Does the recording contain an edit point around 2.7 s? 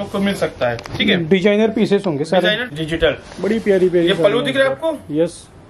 yes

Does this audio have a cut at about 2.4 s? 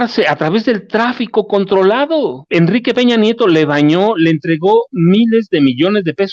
yes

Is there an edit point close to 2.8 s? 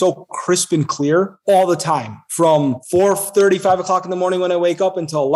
yes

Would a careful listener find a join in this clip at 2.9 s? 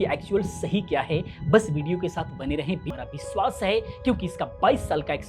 yes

